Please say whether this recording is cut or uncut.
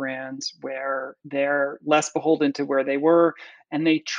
uncut